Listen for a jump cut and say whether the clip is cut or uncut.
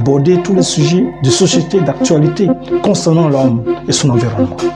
uncut